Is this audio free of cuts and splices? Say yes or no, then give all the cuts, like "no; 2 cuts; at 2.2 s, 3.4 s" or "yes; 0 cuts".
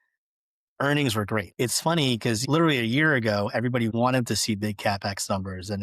no; 3 cuts; at 1.5 s, 2.4 s, 3.9 s